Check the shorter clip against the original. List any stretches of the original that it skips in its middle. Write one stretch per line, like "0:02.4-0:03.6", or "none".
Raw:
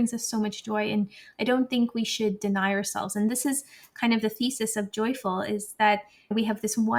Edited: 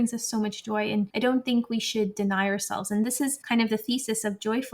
0:01.1-0:01.4
0:03.6-0:03.9